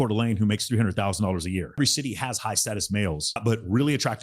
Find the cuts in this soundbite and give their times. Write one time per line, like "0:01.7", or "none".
0:01.8
0:03.4